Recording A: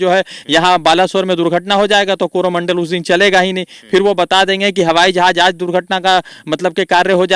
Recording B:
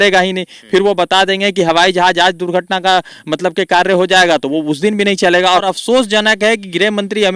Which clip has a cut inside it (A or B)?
B